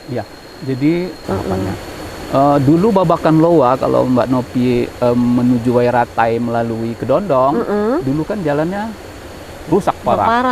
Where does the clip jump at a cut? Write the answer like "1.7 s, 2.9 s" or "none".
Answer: 1.2 s